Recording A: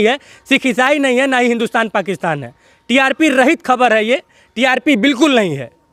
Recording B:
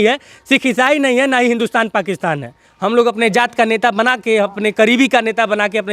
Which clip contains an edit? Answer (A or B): B